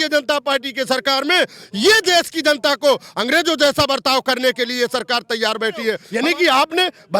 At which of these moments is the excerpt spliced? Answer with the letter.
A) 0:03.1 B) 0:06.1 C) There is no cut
B